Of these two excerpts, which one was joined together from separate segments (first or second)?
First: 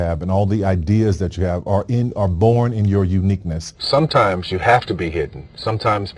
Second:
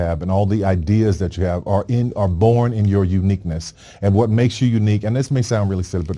first